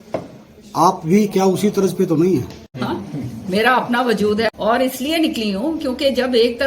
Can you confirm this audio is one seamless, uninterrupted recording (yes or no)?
no